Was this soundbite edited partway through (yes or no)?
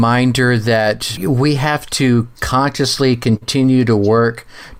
yes